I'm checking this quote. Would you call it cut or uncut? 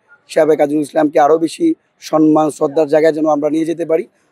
uncut